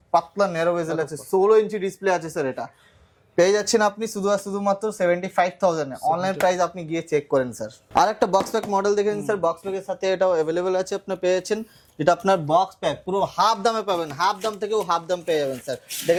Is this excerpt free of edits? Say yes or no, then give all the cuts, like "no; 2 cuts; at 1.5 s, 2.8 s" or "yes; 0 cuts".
yes; 0 cuts